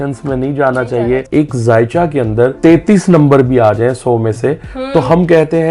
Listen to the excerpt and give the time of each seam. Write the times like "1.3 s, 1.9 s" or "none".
1.3 s, 2.6 s